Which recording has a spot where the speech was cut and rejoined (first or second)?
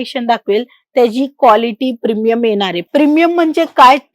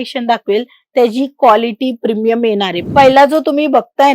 second